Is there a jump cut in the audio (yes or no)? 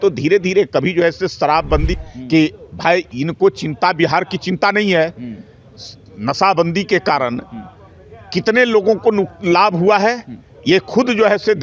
yes